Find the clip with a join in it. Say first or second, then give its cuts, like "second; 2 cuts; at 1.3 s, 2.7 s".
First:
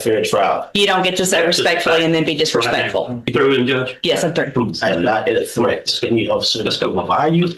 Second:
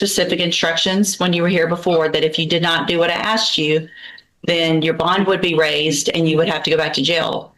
first; 1 cut; at 3.3 s